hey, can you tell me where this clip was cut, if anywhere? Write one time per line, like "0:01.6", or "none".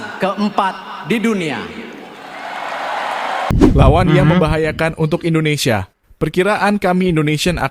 0:03.5